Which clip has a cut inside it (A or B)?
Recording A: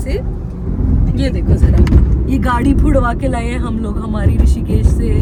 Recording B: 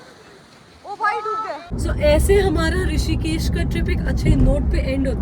B